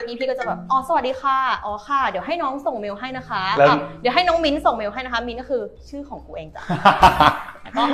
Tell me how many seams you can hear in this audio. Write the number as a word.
zero